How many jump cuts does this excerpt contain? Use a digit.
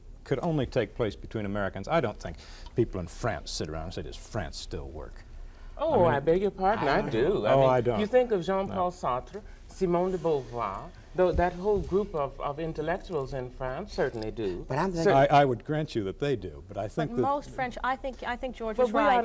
0